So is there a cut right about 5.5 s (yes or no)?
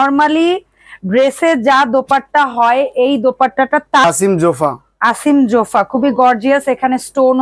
no